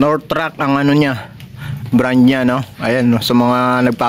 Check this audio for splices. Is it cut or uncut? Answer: uncut